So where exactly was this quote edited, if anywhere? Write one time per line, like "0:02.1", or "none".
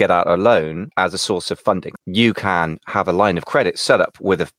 0:00.8
0:01.9